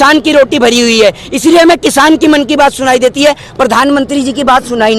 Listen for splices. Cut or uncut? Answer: uncut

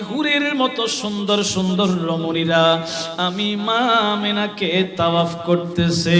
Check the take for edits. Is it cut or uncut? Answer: uncut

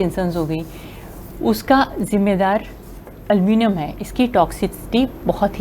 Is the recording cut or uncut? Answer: uncut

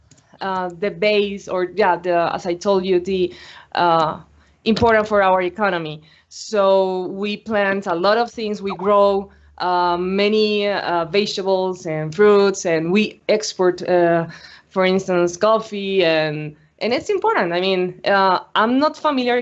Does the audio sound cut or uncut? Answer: cut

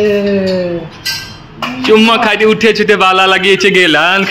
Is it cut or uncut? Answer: uncut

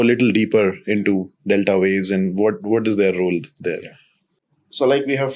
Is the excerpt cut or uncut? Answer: uncut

